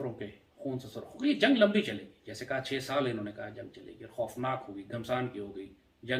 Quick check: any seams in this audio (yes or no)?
no